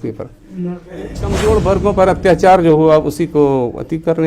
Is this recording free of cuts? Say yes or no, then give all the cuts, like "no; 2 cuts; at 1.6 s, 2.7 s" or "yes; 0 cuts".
no; 1 cut; at 1.4 s